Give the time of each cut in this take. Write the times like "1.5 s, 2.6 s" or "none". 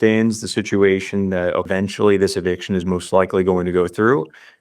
1.7 s